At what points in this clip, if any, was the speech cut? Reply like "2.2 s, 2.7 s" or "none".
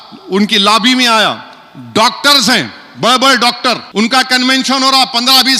3.9 s